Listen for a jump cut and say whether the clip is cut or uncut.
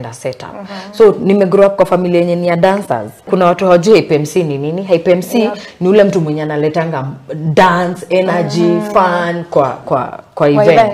cut